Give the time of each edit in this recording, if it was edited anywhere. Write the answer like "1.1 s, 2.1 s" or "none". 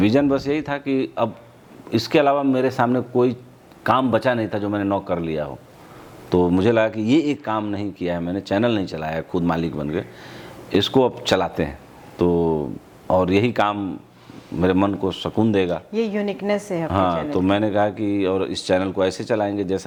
none